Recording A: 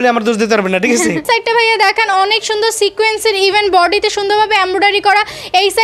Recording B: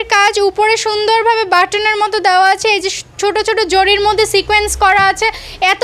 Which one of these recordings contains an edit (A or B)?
A